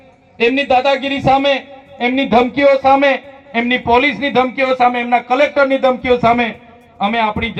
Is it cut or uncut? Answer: uncut